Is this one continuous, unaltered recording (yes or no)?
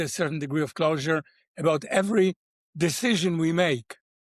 yes